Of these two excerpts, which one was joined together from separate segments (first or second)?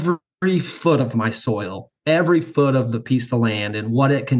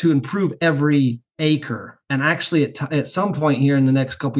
second